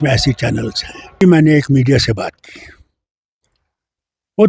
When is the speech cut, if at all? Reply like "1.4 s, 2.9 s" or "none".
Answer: 1.2 s